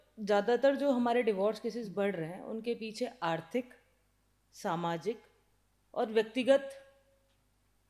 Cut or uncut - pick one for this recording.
uncut